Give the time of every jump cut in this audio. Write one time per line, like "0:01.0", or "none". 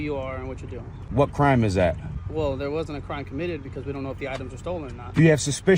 0:01.0
0:02.1